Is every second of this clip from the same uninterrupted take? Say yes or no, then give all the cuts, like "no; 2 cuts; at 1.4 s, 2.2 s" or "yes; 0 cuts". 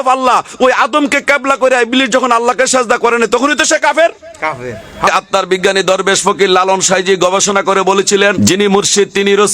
no; 2 cuts; at 5.1 s, 8.4 s